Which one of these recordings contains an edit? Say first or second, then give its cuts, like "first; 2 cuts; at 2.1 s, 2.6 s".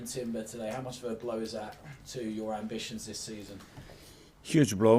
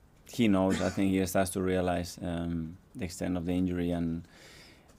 first; 2 cuts; at 0.9 s, 2.4 s